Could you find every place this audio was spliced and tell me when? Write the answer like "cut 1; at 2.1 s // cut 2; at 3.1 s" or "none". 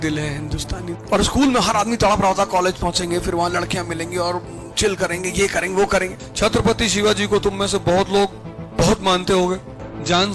cut 1; at 0.9 s // cut 2; at 6.2 s